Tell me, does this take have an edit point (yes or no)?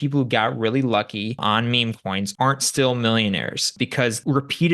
yes